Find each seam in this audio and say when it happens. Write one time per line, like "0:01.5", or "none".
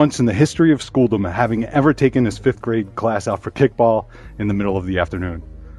none